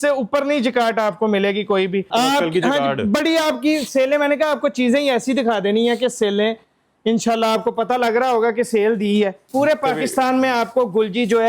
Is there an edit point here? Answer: yes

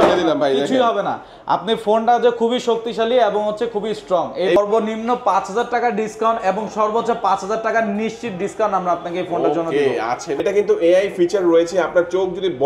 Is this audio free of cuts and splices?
no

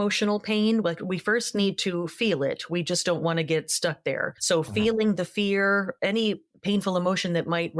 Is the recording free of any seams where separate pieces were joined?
no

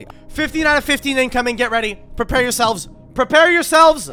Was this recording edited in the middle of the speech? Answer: no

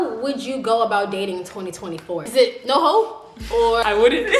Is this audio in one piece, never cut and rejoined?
yes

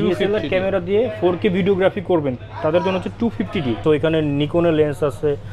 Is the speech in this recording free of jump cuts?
no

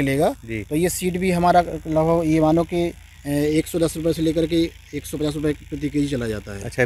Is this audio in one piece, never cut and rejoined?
yes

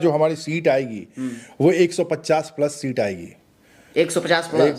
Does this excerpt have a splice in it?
no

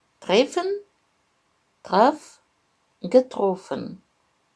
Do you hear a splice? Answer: no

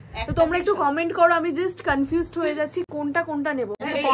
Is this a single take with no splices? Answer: yes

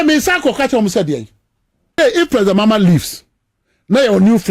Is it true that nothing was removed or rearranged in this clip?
no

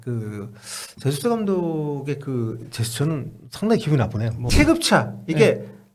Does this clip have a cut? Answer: yes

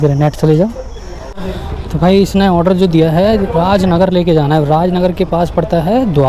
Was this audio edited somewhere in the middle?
yes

